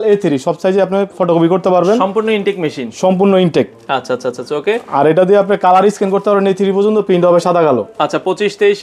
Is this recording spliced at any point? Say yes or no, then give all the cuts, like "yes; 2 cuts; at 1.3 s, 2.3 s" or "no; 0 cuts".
no; 0 cuts